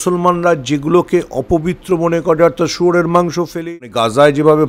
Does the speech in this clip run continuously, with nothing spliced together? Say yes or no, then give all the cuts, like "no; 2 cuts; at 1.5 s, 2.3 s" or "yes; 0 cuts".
no; 1 cut; at 3.6 s